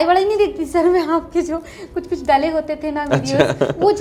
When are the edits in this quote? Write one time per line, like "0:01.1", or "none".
none